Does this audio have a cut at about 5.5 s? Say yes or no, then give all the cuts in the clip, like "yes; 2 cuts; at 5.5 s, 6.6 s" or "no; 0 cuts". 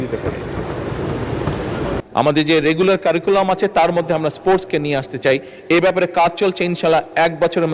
no; 1 cut; at 2.0 s